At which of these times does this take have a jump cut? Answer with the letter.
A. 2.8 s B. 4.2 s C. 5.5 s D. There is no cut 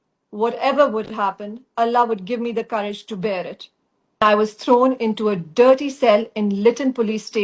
B